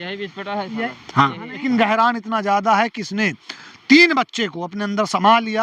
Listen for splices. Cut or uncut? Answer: cut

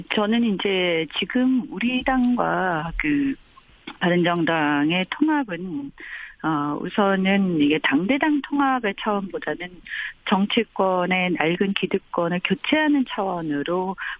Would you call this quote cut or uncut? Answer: uncut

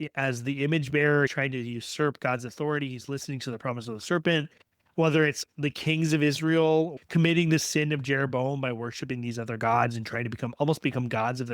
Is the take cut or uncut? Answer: cut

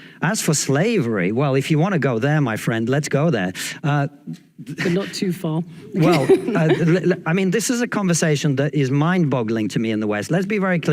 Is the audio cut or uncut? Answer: cut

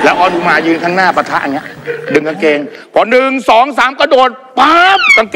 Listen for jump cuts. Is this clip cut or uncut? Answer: uncut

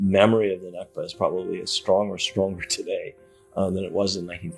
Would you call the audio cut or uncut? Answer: uncut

